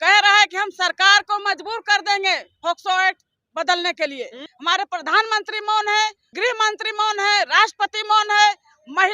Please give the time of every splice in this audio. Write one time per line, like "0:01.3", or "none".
0:04.5
0:06.3